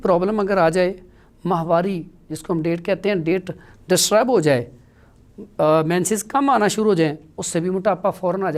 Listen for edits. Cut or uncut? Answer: uncut